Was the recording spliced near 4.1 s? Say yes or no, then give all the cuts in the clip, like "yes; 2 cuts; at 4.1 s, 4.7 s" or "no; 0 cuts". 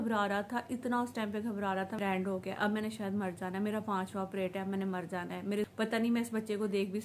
no; 2 cuts; at 2.0 s, 5.7 s